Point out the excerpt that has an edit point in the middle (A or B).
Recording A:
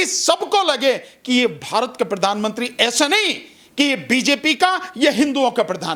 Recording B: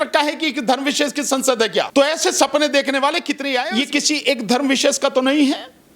B